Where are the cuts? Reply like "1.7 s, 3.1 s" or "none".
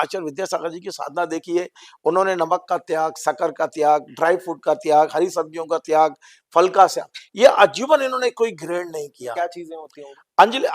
9.4 s